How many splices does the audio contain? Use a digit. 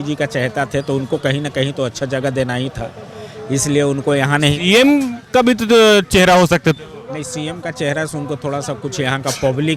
0